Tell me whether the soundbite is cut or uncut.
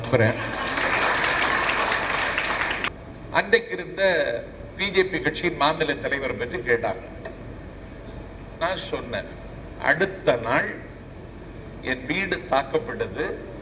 cut